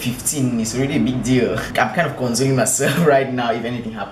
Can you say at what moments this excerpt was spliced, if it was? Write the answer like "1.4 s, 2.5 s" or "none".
1.7 s